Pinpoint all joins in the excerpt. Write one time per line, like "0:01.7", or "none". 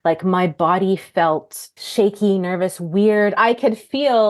0:01.8
0:03.4